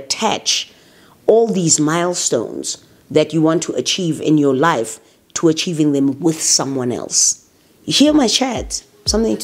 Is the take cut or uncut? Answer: uncut